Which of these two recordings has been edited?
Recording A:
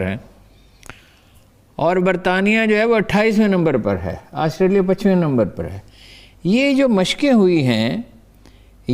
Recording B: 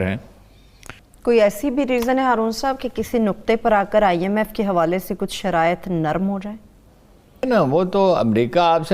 B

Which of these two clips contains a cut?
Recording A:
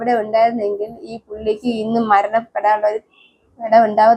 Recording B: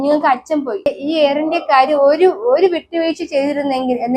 B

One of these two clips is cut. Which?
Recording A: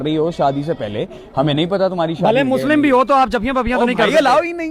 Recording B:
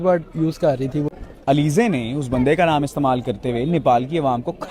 B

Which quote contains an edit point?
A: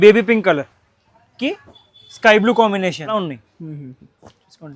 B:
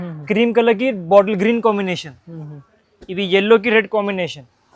A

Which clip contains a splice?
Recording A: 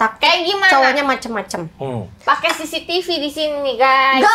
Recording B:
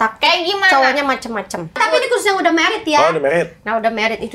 B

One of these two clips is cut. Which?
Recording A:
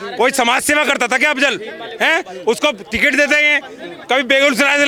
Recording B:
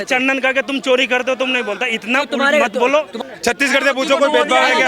B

